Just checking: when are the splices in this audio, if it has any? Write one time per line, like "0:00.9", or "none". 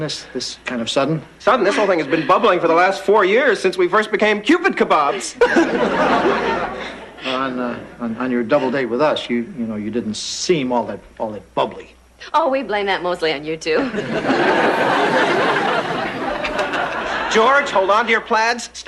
none

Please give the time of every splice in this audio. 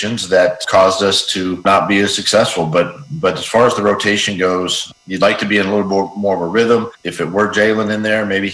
none

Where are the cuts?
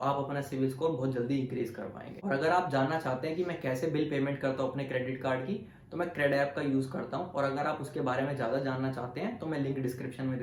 none

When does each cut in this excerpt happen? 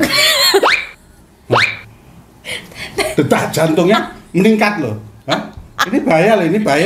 none

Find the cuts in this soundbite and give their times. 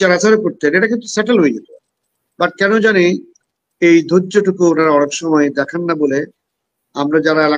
none

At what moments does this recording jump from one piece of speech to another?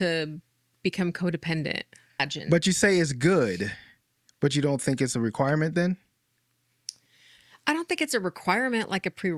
0:02.3

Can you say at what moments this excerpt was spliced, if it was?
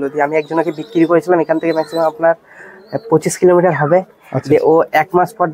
none

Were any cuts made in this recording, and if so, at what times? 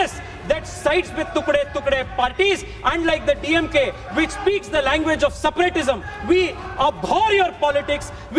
none

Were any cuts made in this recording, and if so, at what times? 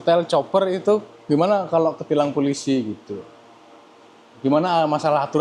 none

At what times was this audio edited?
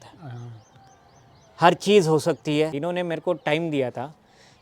0:02.8

